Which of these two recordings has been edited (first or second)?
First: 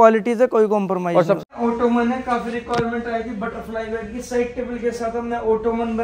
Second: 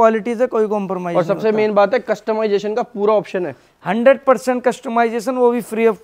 first